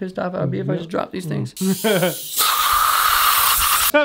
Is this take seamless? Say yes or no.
no